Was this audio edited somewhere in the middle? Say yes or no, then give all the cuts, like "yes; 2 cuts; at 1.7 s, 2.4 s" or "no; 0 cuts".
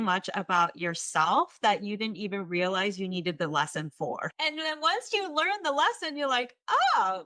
yes; 1 cut; at 4.4 s